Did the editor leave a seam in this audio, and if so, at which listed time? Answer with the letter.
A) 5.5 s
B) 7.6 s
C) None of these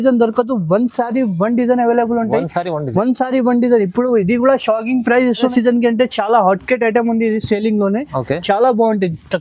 A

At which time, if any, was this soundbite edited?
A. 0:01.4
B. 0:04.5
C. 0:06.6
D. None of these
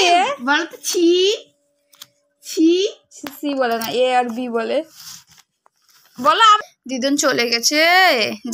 C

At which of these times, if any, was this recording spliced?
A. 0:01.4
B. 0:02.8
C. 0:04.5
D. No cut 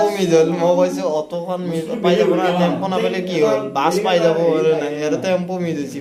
D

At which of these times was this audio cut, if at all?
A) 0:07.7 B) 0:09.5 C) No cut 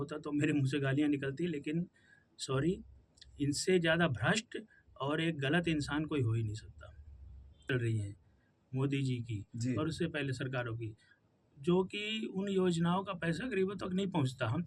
A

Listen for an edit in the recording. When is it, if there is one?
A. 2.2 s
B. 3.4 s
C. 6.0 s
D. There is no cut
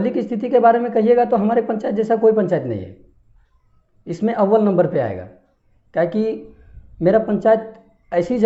D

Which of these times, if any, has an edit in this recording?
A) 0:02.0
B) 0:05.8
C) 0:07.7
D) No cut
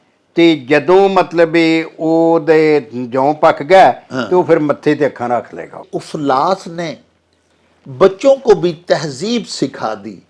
B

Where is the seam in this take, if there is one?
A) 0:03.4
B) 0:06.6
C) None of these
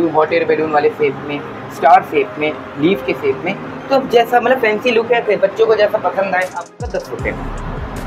B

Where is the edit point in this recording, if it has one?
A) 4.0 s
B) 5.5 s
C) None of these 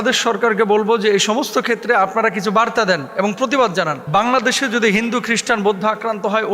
A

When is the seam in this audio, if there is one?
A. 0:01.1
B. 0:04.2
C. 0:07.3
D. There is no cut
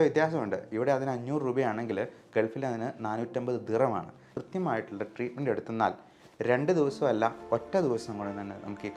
B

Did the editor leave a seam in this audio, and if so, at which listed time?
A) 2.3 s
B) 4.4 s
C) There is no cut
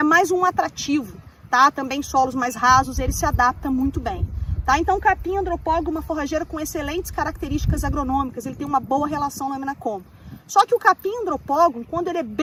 C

